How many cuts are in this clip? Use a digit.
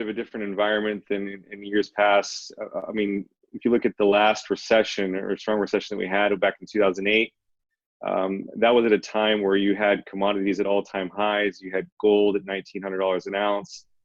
0